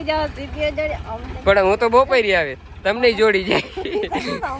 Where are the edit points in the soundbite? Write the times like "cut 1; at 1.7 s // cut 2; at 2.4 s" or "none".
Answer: none